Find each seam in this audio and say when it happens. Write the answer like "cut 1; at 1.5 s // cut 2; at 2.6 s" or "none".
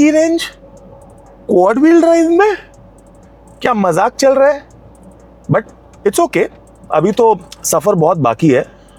none